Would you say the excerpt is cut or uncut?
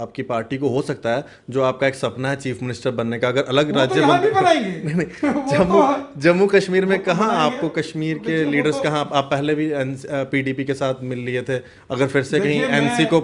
uncut